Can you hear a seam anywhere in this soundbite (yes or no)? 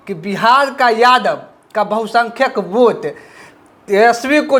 no